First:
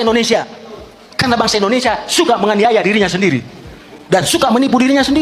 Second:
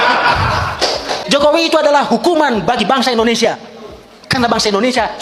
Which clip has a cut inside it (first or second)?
second